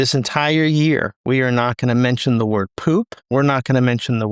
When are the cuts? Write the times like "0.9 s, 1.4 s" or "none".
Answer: none